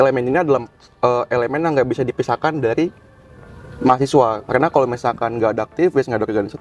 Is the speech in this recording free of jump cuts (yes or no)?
yes